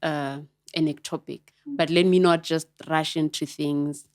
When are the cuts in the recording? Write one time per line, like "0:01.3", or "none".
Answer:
0:01.8